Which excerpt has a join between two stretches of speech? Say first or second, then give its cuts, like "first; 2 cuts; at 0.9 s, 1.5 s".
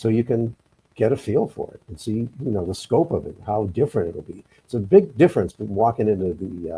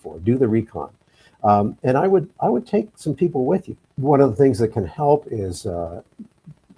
second; 1 cut; at 3.9 s